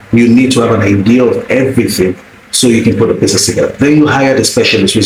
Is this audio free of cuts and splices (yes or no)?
yes